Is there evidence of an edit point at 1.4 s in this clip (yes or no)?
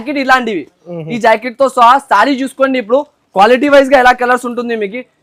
no